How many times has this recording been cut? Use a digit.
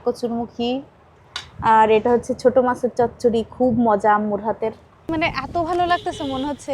1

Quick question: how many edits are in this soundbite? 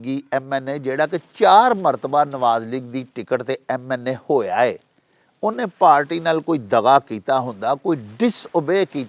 0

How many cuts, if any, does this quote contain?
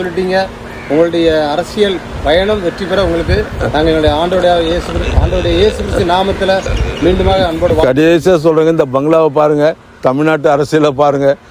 0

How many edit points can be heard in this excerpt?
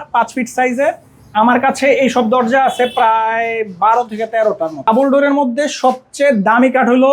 1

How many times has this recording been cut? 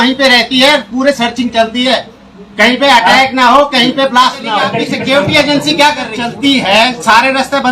2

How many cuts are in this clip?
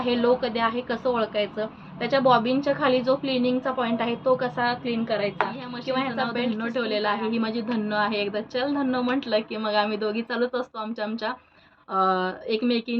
1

